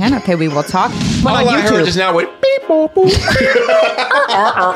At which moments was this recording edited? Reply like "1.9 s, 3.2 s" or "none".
1.1 s